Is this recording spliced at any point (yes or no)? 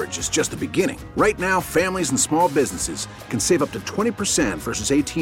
no